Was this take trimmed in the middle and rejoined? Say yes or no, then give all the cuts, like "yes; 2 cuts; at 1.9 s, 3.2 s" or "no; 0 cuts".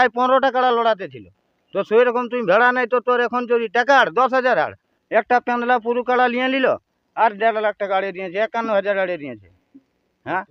yes; 1 cut; at 4.9 s